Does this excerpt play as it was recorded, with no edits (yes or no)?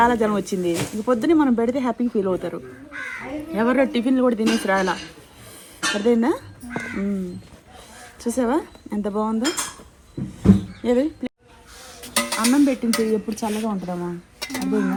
yes